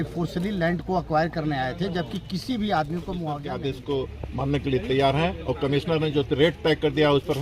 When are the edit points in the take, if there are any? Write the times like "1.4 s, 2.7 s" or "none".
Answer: 3.5 s